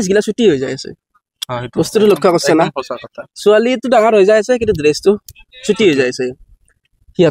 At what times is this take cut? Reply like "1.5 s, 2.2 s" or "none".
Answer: none

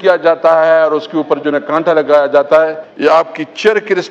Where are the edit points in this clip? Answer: 2.8 s

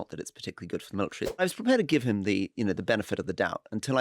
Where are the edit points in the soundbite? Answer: 1.4 s

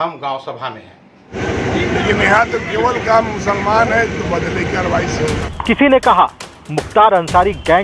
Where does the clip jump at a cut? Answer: 1.3 s, 5.5 s

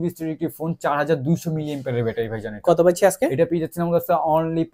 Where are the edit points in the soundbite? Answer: none

